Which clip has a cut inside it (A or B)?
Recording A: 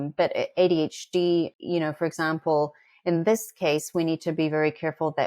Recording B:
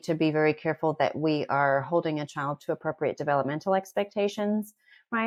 A